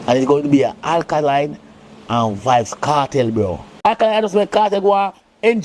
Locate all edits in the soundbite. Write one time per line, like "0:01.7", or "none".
0:03.7